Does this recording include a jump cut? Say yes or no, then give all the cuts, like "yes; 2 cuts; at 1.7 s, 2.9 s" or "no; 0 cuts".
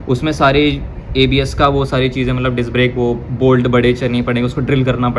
no; 0 cuts